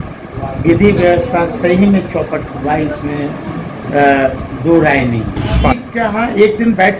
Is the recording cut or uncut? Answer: cut